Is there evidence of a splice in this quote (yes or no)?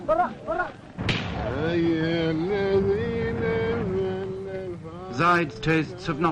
yes